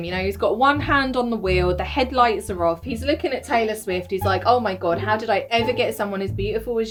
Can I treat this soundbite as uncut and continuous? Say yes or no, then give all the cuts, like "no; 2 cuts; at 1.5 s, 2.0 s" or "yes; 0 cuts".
yes; 0 cuts